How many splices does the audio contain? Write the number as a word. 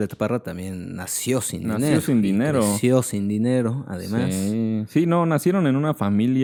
zero